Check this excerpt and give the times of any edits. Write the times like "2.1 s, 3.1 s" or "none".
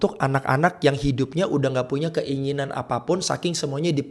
none